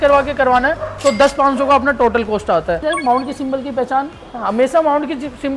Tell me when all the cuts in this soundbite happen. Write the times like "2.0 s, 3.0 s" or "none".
2.8 s